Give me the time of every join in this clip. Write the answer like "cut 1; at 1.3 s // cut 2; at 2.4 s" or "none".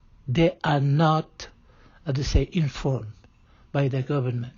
none